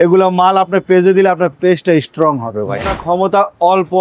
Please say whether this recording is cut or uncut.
cut